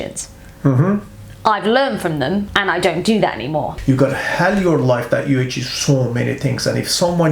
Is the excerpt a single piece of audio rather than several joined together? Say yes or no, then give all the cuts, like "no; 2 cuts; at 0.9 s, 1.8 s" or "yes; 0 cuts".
no; 2 cuts; at 2.5 s, 3.7 s